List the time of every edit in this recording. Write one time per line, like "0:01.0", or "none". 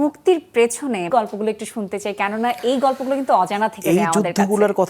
0:01.1